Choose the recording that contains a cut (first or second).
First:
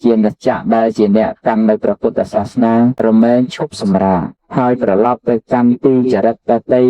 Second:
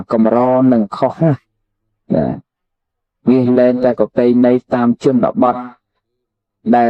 first